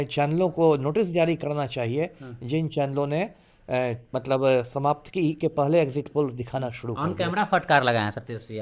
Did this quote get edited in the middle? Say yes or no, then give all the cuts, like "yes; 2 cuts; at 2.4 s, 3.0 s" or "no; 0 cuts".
no; 0 cuts